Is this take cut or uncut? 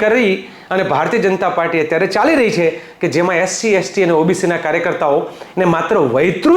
uncut